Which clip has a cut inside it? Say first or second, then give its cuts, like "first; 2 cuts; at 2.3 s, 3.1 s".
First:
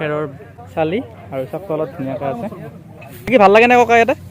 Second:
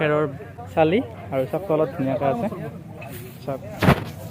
first; 1 cut; at 3.3 s